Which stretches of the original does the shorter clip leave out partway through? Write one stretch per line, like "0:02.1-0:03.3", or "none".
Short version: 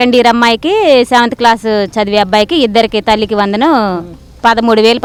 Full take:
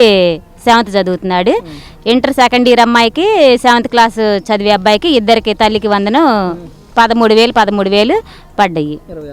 none